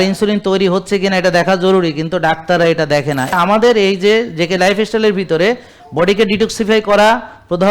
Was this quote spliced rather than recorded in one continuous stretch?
yes; 1 cut; at 3.3 s

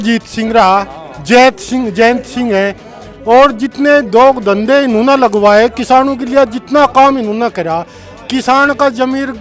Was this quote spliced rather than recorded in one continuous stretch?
no; 0 cuts

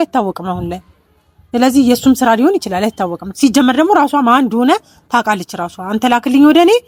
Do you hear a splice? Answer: no; 0 cuts

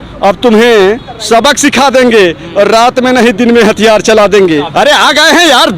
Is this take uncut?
no; 1 cut; at 4.7 s

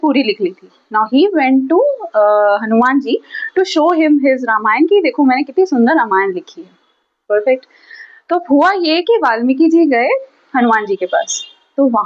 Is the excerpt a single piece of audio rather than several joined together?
no; 1 cut; at 4.8 s

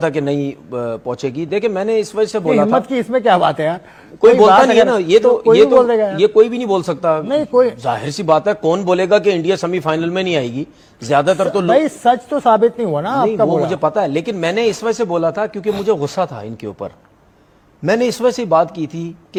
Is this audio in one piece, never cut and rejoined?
yes; 0 cuts

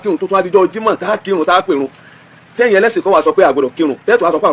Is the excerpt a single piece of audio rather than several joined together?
yes; 0 cuts

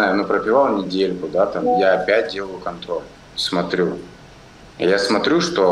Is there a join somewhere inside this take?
no; 0 cuts

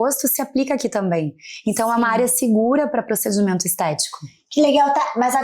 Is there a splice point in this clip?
no; 0 cuts

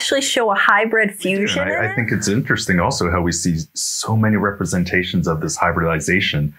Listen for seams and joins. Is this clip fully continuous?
no; 1 cut; at 1.7 s

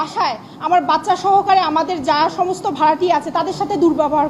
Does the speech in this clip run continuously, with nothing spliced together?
yes; 0 cuts

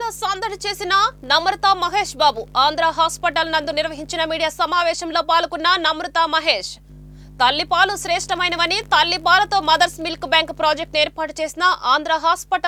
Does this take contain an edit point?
no; 0 cuts

